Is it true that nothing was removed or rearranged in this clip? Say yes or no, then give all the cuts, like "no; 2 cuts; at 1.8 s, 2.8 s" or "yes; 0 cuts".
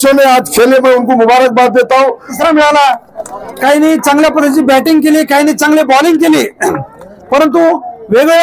no; 1 cut; at 2.3 s